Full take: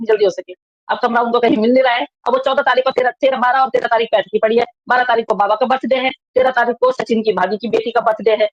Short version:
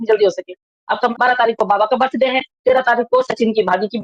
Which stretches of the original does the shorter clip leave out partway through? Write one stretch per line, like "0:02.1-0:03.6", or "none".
0:01.1-0:04.8